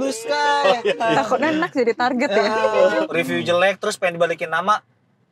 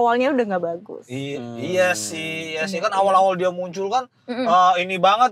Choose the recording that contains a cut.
first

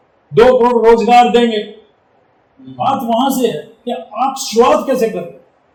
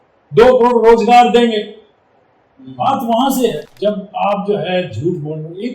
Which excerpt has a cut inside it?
second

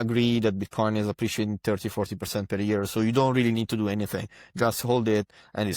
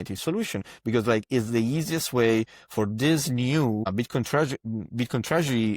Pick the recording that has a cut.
second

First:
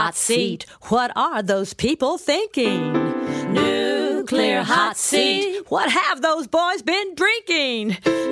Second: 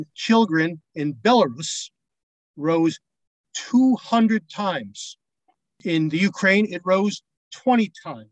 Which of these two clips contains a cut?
second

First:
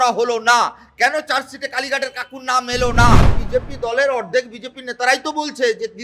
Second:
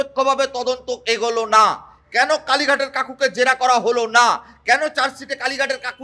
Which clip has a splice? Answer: first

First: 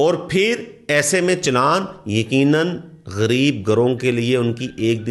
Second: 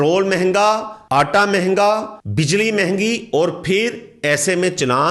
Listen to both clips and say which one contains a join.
second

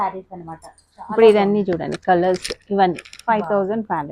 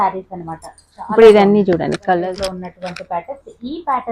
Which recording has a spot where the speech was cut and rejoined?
second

